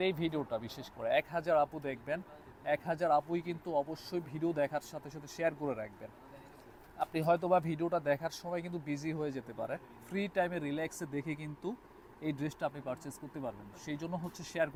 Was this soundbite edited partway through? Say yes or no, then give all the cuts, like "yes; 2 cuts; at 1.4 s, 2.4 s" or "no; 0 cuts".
no; 0 cuts